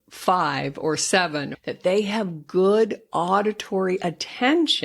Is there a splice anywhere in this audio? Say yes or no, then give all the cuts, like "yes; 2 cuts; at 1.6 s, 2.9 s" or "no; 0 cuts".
yes; 1 cut; at 1.5 s